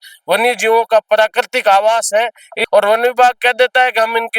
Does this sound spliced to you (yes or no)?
yes